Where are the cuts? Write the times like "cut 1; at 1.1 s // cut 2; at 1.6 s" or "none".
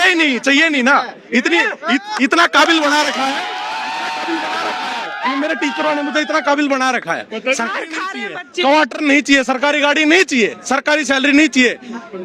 cut 1; at 7.7 s